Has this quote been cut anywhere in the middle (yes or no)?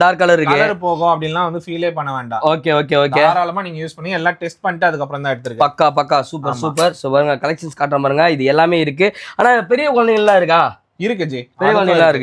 no